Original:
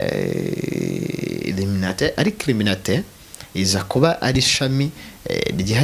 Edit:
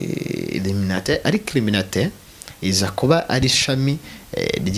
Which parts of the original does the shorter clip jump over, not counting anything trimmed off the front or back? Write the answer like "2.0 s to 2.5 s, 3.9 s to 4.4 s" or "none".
none